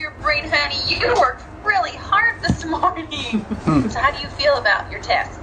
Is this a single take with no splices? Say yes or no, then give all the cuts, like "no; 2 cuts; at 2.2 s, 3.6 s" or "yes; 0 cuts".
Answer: yes; 0 cuts